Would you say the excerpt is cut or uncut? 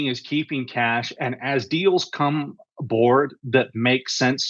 uncut